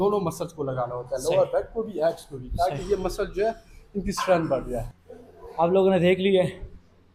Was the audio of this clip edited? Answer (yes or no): no